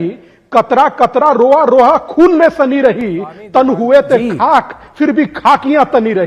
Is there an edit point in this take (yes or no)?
no